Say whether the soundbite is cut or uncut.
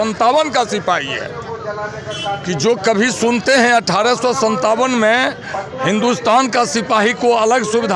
uncut